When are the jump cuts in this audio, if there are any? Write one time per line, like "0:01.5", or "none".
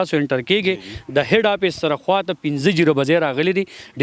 none